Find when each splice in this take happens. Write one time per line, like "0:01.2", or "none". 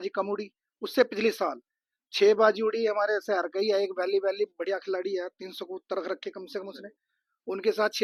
none